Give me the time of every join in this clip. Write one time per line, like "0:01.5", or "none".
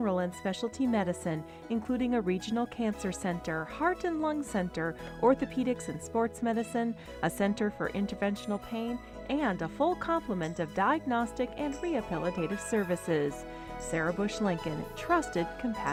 none